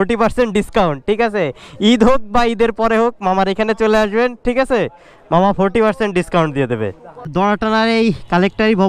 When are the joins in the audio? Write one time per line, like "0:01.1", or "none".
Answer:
0:07.3